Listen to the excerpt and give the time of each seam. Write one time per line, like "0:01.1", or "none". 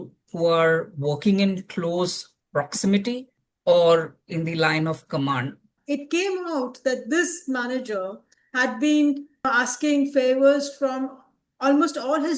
0:05.7
0:09.5